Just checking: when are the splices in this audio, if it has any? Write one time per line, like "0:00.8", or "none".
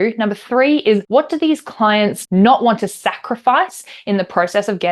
0:01.0
0:02.2

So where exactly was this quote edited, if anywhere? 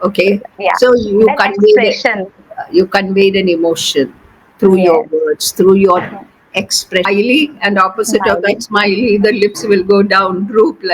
0:07.1

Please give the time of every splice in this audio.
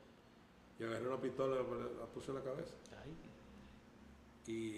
none

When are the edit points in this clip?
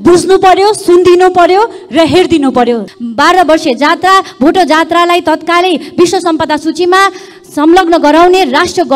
0:02.9

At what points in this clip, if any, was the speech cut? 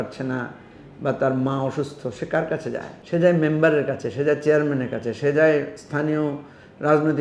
0:03.0

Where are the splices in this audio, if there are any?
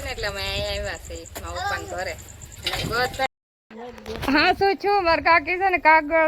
0:03.3

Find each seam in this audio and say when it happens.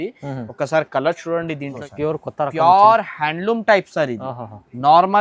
0:01.8

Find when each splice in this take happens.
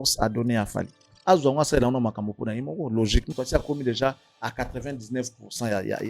0:03.3

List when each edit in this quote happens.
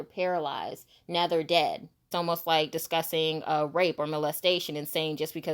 0:02.0

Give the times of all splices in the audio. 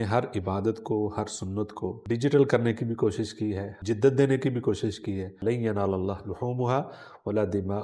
0:02.0
0:03.7
0:05.4

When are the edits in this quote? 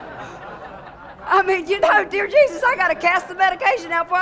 0:01.0

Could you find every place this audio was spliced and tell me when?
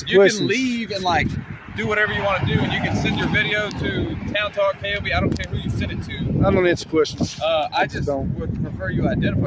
none

